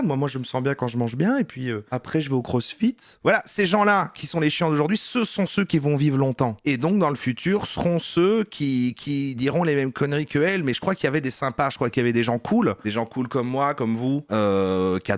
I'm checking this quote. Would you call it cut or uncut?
uncut